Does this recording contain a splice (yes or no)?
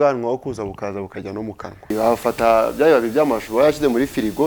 yes